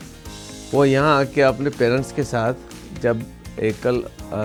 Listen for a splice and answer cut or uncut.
uncut